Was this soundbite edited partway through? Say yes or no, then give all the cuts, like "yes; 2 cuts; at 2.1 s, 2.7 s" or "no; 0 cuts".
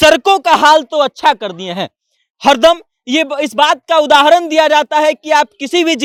no; 0 cuts